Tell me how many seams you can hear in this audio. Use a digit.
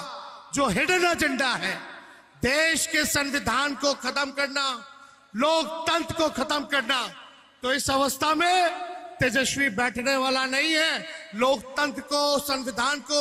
0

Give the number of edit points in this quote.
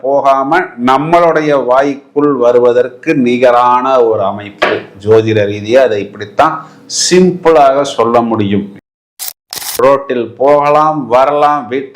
1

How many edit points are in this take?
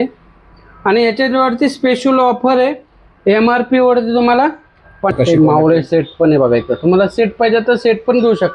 1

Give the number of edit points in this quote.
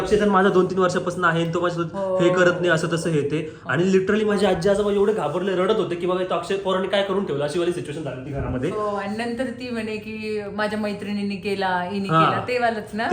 0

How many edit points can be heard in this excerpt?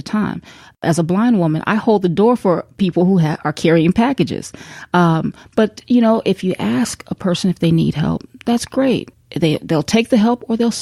3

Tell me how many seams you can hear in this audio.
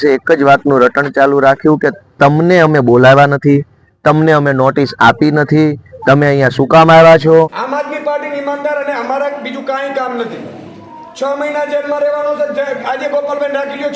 1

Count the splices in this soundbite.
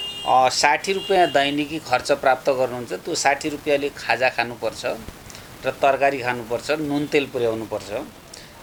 0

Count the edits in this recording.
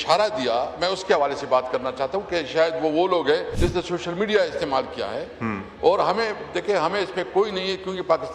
1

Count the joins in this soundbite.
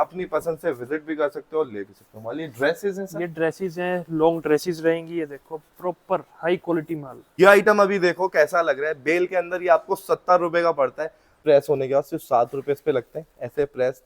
2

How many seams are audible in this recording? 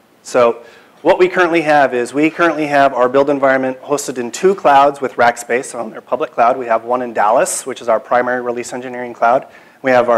1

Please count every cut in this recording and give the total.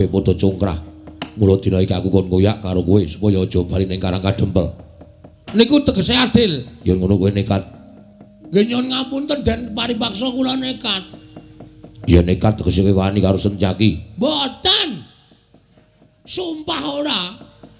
1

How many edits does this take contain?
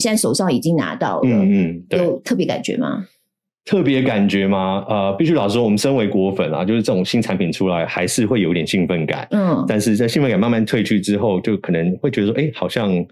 0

